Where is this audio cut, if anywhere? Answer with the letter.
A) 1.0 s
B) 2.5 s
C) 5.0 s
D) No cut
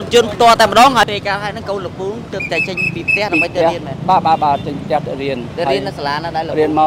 A